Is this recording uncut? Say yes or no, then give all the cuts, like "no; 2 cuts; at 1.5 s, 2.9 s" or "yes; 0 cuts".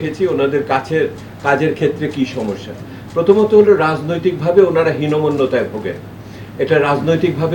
yes; 0 cuts